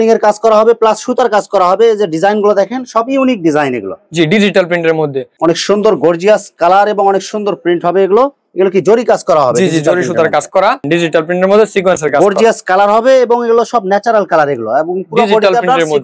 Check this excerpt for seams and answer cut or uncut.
cut